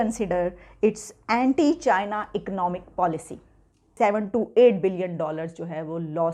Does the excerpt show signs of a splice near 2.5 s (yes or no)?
no